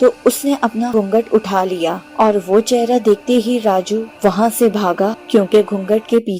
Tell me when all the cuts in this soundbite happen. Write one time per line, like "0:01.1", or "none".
0:00.9
0:02.0
0:04.1
0:05.2